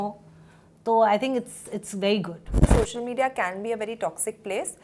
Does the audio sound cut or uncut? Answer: cut